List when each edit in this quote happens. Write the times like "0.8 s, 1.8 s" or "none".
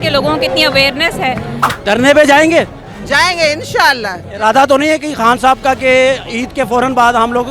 1.6 s